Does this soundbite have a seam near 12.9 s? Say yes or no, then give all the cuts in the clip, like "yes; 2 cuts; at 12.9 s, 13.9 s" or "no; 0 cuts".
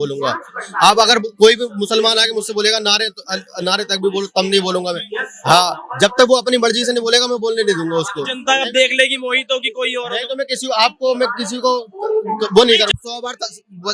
yes; 1 cut; at 12.9 s